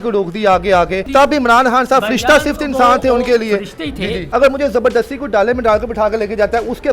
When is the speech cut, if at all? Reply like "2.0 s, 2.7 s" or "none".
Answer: 1.0 s, 4.2 s

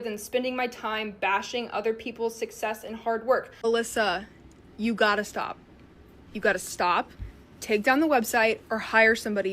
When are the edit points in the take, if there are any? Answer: 3.5 s

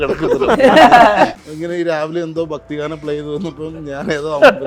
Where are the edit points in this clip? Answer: 1.4 s

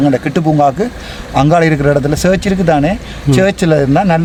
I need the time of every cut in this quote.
none

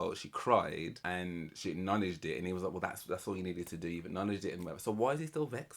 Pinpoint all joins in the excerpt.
1.0 s

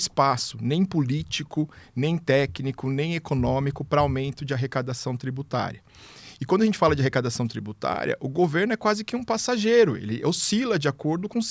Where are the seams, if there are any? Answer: none

